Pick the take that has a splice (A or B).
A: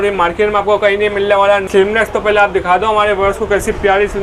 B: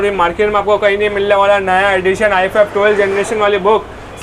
A